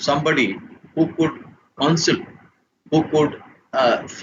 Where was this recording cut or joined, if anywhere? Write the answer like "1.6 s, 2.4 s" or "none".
none